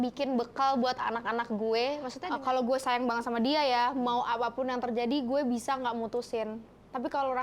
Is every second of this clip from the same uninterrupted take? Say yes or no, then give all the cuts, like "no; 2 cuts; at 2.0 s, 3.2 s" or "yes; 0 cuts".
no; 1 cut; at 2.1 s